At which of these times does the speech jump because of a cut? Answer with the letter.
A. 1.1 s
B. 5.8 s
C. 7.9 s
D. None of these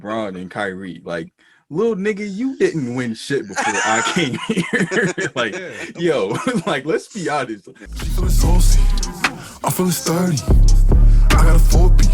C